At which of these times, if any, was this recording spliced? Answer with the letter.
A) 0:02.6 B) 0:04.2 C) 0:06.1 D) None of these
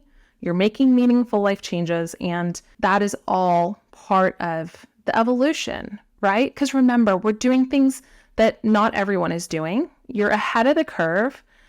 A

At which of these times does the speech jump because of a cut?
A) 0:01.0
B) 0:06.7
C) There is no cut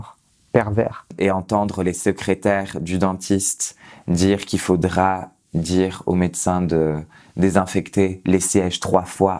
A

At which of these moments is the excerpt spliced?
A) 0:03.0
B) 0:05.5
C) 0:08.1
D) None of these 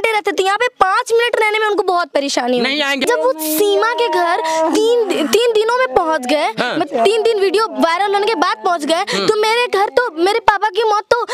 A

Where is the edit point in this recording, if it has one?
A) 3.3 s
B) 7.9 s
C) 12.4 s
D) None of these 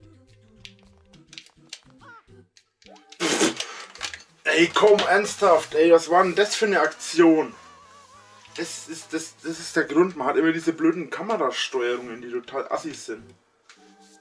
D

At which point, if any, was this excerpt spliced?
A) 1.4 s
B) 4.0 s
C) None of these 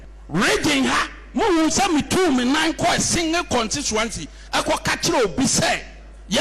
B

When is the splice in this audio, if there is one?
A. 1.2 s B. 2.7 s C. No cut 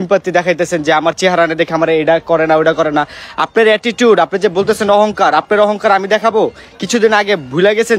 C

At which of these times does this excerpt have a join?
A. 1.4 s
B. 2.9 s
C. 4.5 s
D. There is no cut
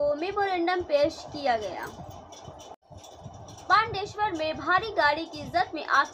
B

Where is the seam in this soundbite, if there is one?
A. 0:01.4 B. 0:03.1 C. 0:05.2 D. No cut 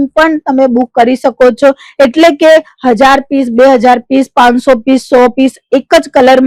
D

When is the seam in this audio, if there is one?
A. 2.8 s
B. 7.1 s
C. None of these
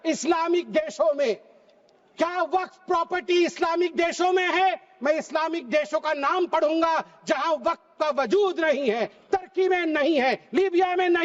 C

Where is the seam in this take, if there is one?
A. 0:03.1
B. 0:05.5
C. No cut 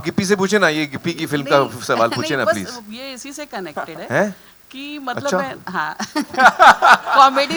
C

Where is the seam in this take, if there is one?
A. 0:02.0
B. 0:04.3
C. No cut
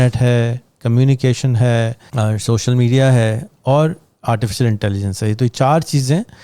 A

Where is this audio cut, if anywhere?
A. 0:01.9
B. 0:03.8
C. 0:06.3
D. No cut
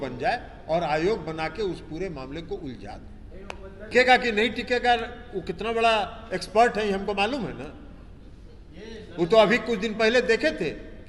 B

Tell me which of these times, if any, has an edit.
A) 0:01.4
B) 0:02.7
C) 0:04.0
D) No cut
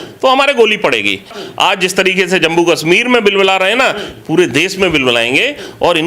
A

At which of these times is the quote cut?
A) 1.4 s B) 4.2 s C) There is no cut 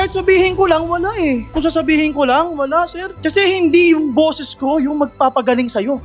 C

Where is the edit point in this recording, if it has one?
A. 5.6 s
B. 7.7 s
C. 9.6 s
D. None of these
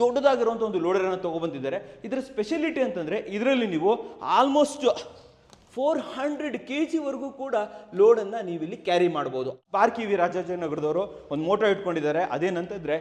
C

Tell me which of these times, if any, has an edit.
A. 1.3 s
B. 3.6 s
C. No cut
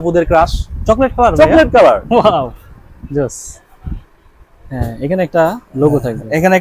C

